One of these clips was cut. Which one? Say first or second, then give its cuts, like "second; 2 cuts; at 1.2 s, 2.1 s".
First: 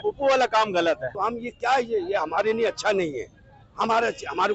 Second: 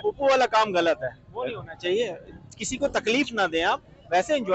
first; 1 cut; at 1.1 s